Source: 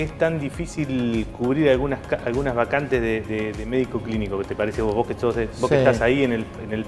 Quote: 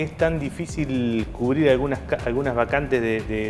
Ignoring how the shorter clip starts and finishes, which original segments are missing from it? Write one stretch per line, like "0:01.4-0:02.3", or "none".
none